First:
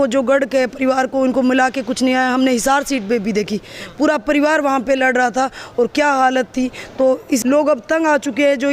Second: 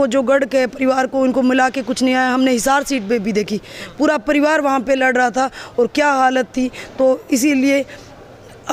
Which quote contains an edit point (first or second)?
first